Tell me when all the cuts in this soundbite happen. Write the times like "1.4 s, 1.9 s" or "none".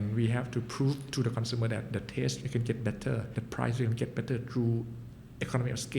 3.3 s